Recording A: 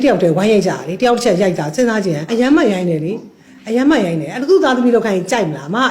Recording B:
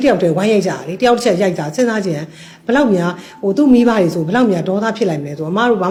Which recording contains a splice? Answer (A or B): A